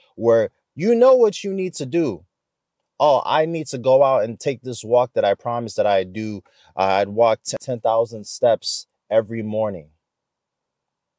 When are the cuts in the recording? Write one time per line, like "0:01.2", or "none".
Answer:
0:07.6